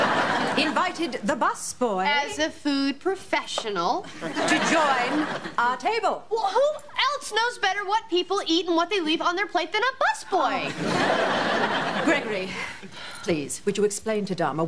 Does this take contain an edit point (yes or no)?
no